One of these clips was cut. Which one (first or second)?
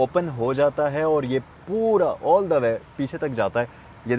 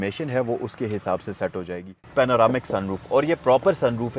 second